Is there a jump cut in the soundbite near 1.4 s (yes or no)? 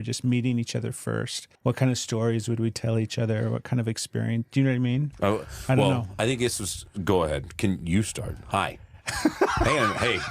yes